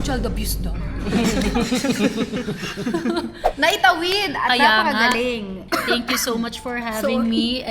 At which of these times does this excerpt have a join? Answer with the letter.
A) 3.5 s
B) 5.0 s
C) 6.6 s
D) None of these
A